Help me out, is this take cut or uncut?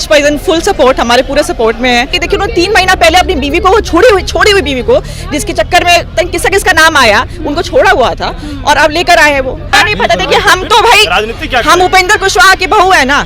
cut